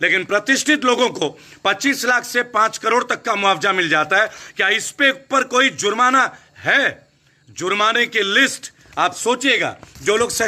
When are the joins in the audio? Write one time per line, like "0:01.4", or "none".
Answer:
none